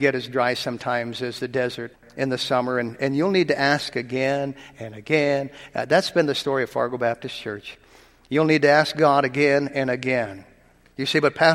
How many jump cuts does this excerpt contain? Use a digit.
1